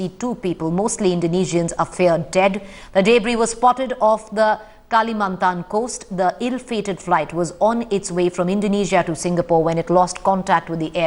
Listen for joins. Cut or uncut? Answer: uncut